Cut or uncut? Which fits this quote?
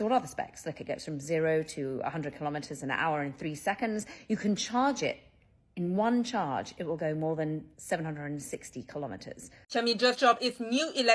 cut